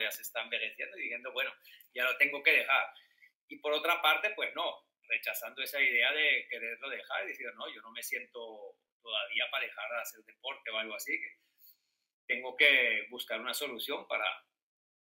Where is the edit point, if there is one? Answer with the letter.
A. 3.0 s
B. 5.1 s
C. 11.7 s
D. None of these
D